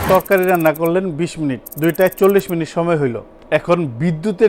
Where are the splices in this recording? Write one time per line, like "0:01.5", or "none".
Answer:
0:03.3